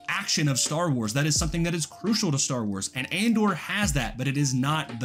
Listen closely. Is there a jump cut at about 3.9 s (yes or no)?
no